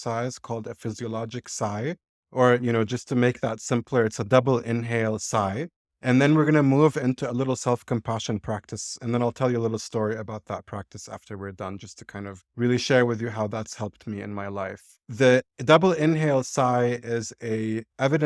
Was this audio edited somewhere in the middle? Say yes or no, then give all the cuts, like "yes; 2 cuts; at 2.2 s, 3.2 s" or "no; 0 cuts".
no; 0 cuts